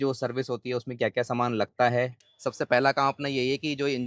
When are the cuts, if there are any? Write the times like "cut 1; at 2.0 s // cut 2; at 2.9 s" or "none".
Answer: cut 1; at 2.2 s